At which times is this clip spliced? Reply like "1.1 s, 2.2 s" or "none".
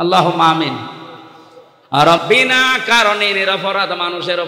2.2 s